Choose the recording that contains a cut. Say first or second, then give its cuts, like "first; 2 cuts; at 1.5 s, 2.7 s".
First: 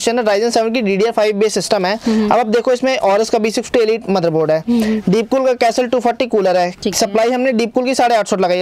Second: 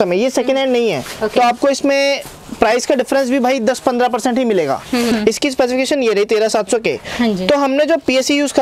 second; 1 cut; at 5.1 s